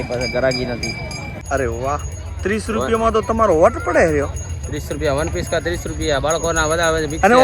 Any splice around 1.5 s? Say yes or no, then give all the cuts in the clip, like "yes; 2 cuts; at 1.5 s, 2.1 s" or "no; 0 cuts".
yes; 1 cut; at 1.5 s